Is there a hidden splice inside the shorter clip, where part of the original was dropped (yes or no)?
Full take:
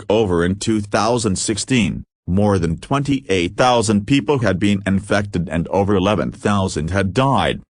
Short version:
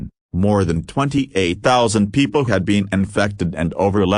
no